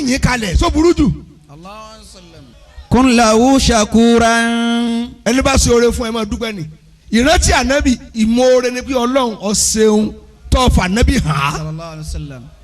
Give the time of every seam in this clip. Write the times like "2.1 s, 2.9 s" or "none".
2.6 s